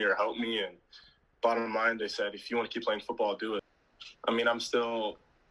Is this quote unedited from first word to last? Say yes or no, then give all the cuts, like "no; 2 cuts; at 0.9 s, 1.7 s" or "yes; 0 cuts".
no; 1 cut; at 3.7 s